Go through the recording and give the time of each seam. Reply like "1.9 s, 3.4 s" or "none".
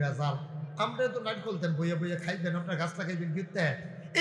none